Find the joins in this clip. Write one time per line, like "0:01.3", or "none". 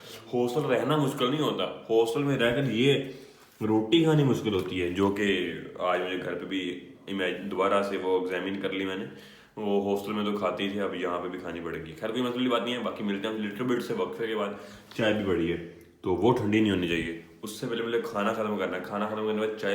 none